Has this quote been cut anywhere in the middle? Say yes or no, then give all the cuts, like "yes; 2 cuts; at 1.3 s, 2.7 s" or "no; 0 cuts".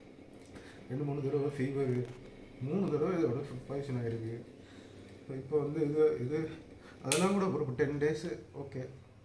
no; 0 cuts